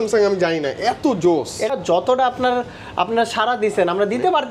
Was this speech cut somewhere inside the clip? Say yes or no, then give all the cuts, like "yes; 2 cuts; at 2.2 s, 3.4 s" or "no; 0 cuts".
yes; 1 cut; at 1.7 s